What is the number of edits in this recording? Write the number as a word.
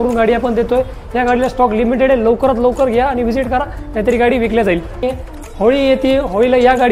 one